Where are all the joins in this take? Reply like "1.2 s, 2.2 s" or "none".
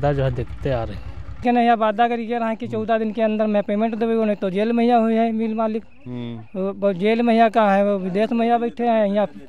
1.4 s